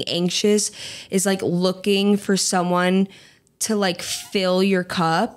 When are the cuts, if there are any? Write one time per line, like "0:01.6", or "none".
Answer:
none